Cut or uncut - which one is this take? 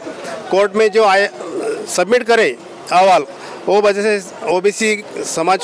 uncut